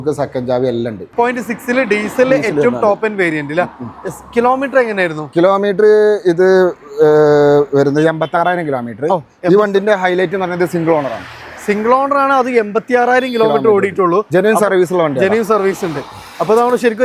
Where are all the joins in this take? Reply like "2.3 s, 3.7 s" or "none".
1.1 s